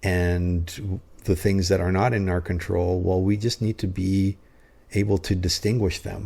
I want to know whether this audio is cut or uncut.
uncut